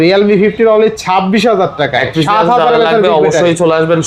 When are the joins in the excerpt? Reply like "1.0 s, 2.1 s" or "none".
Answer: none